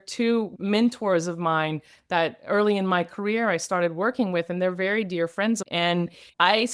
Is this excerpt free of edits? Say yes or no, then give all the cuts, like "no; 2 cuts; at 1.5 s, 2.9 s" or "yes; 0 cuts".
no; 1 cut; at 5.6 s